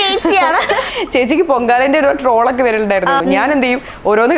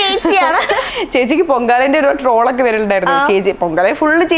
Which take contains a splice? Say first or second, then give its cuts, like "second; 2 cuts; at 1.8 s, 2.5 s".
first; 1 cut; at 3.2 s